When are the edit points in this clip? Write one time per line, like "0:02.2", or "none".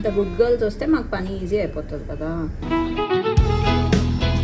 0:02.6